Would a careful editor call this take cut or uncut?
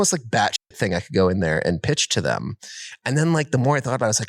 uncut